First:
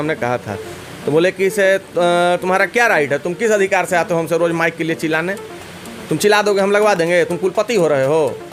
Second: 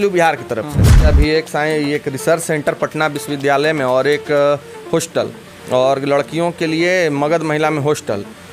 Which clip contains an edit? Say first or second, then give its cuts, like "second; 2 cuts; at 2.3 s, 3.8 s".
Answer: second; 1 cut; at 1.1 s